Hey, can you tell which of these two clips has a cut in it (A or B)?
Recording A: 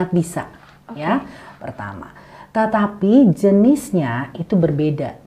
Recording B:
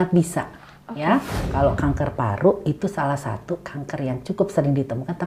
B